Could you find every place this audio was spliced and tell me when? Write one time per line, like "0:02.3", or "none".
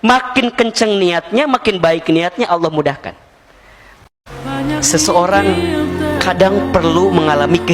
0:04.1